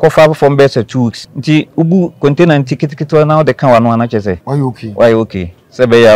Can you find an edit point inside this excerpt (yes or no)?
yes